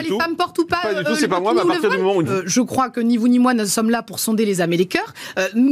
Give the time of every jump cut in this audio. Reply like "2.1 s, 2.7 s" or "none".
2.3 s